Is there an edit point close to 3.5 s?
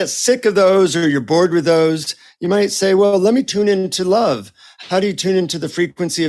yes; 1 cut; at 3.5 s

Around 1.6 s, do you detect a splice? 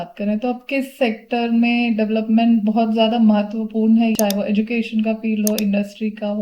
no; 1 cut; at 4.2 s

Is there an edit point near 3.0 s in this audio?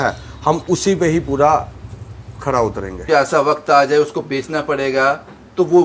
yes; 1 cut; at 3.0 s

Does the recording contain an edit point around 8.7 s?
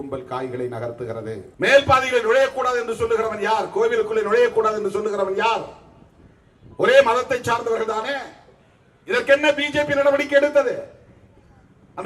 no; 1 cut; at 1.4 s

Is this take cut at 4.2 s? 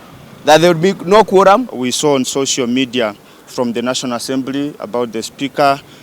no; 1 cut; at 1.8 s

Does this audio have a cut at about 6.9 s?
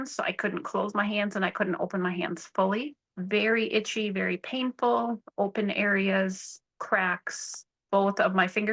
no; 0 cuts

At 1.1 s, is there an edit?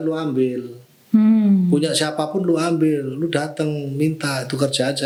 no; 0 cuts

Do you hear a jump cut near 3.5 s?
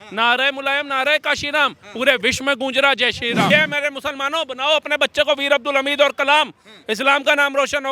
yes; 1 cut; at 3.5 s

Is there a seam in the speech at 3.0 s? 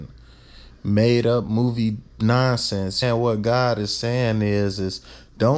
yes; 1 cut; at 3.0 s

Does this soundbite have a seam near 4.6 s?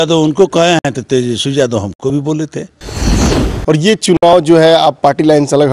no; 1 cut; at 3.2 s

